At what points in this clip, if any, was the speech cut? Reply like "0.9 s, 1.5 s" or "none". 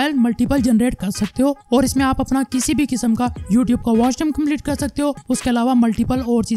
none